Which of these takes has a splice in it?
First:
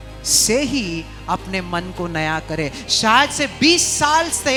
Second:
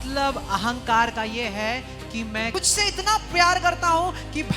second; 1 cut; at 2.5 s

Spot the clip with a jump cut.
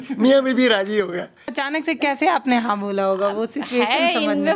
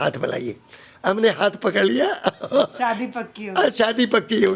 first; 1 cut; at 1.6 s

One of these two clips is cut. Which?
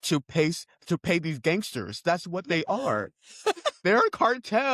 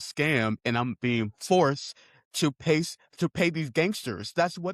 first; 1 cut; at 3.8 s

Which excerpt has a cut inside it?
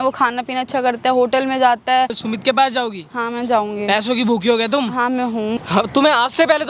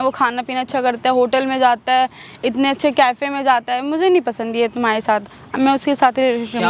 first; 2 cuts; at 2.2 s, 5.6 s

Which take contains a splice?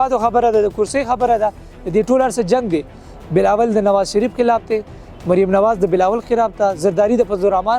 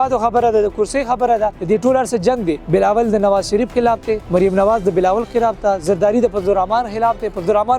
second; 3 cuts; at 1.6 s, 2.6 s, 4.2 s

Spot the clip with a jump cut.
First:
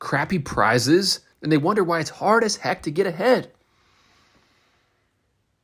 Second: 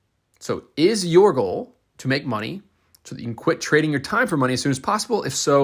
first; 1 cut; at 1.3 s

